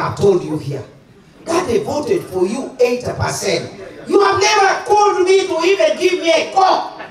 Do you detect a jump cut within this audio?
no; 0 cuts

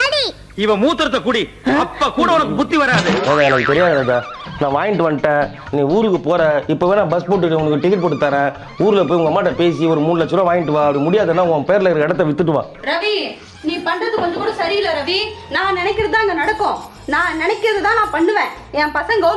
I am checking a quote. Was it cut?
no; 0 cuts

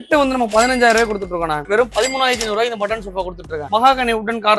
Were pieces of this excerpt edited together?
yes; 2 cuts; at 1.6 s, 3.7 s

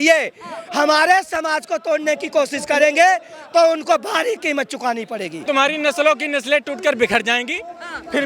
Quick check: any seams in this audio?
yes; 1 cut; at 5.4 s

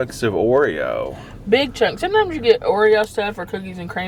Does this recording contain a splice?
no; 0 cuts

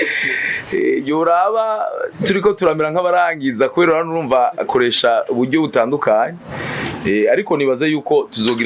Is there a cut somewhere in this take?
no; 0 cuts

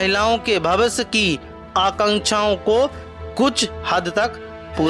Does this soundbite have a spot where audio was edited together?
no; 0 cuts

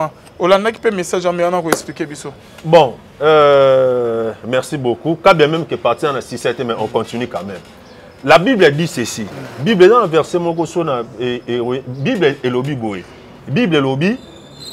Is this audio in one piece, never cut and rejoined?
yes; 0 cuts

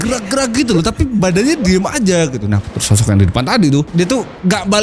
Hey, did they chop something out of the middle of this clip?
yes; 1 cut; at 2.6 s

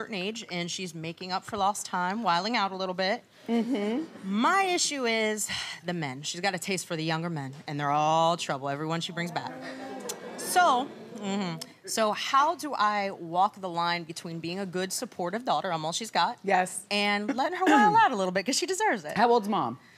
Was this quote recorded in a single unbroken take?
yes; 0 cuts

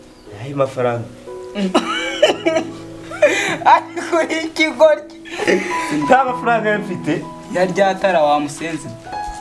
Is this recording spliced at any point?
no; 0 cuts

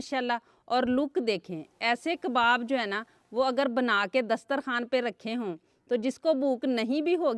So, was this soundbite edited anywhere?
no; 0 cuts

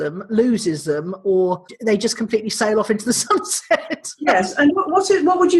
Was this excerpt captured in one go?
no; 1 cut; at 1.7 s

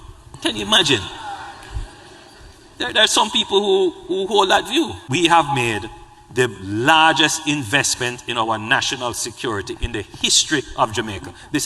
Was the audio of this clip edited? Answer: yes; 1 cut; at 5.0 s

